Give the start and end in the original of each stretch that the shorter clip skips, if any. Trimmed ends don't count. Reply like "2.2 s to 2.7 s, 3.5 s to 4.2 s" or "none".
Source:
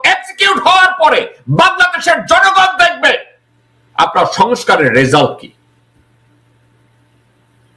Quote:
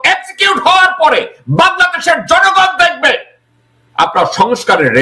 none